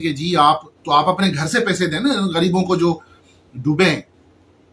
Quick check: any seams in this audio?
no; 0 cuts

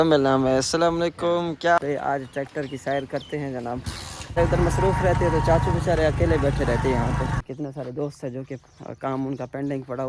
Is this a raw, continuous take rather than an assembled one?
no; 3 cuts; at 1.8 s, 4.4 s, 7.4 s

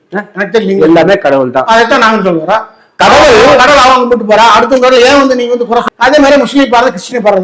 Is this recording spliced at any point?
yes; 1 cut; at 5.8 s

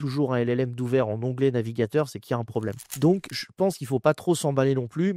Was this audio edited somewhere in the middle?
yes; 1 cut; at 2.9 s

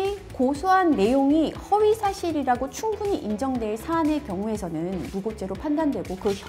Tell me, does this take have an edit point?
no; 0 cuts

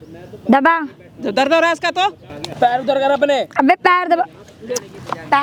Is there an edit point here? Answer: no; 0 cuts

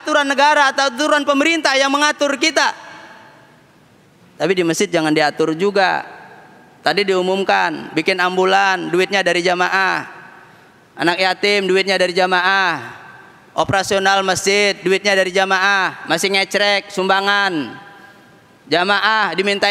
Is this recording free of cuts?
yes; 0 cuts

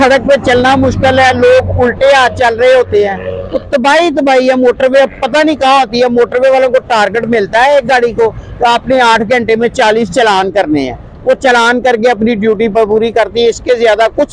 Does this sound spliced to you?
no; 0 cuts

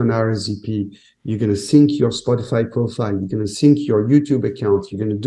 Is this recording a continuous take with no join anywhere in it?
yes; 0 cuts

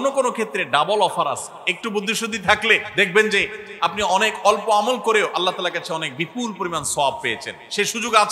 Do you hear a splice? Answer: yes; 1 cut; at 2.9 s

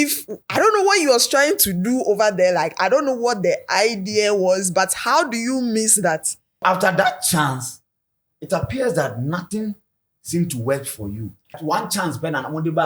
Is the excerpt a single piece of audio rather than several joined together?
no; 2 cuts; at 6.6 s, 11.6 s

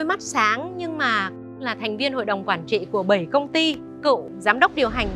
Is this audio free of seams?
no; 2 cuts; at 1.6 s, 3.9 s

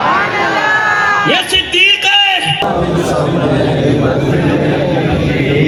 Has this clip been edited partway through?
no; 0 cuts

